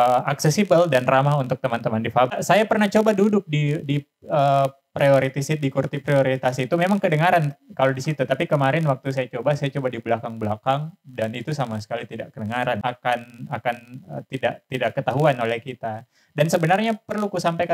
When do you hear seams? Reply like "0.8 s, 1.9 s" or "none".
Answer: 2.3 s, 12.8 s